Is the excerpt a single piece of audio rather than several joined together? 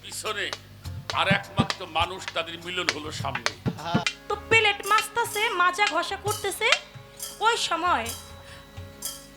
no; 1 cut; at 4.0 s

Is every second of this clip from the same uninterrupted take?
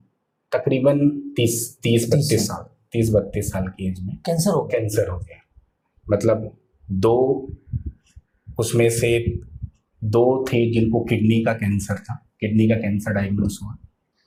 yes; 0 cuts

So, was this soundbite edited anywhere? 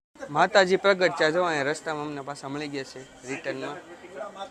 no; 0 cuts

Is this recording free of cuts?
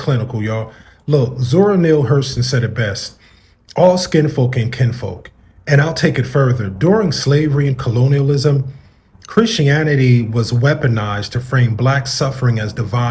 yes; 0 cuts

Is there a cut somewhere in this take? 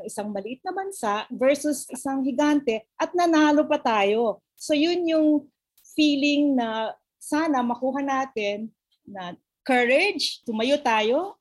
yes; 1 cut; at 1.9 s

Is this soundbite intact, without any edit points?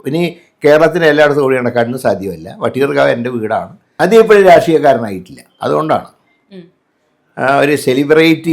no; 1 cut; at 3.8 s

